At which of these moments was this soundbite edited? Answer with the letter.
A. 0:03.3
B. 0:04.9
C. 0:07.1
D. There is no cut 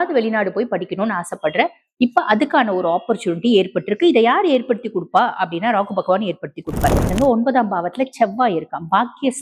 C